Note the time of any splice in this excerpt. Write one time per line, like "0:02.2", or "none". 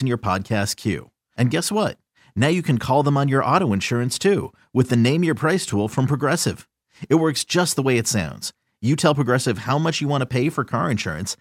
none